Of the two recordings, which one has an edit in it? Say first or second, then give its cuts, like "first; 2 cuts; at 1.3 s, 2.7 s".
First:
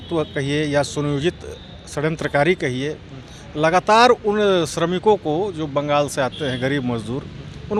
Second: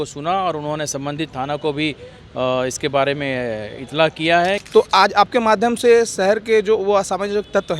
second; 1 cut; at 4.6 s